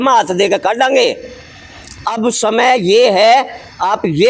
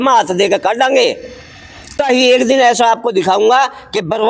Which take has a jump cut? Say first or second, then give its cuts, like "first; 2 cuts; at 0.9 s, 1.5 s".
second; 1 cut; at 1.9 s